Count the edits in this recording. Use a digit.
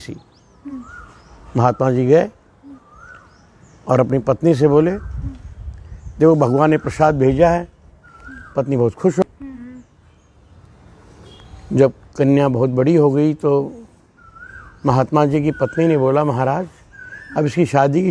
1